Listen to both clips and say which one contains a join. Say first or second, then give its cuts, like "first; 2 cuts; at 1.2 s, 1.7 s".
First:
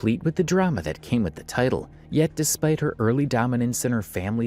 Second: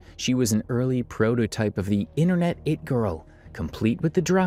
first; 1 cut; at 2.0 s